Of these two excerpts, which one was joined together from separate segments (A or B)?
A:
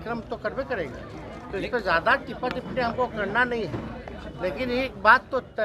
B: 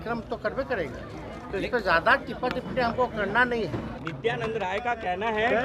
B